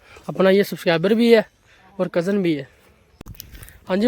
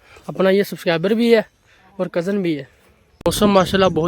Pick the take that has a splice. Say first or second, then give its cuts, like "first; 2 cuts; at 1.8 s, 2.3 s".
second; 1 cut; at 3.1 s